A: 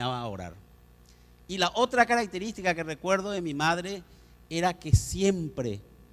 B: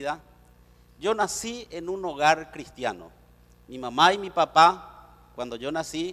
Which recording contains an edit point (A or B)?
A